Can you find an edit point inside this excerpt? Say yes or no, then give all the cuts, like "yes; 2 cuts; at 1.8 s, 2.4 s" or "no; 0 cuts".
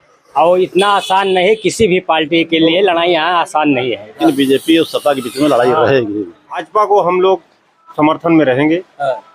yes; 2 cuts; at 4.2 s, 6.5 s